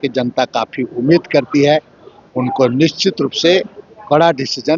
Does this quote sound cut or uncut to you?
uncut